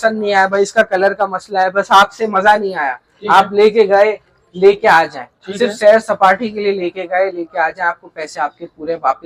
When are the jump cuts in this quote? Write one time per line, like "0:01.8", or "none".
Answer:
none